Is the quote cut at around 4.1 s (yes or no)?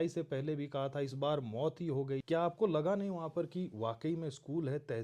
no